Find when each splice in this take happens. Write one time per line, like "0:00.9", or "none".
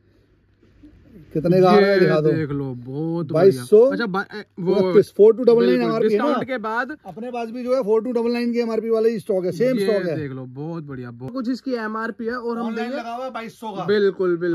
0:11.3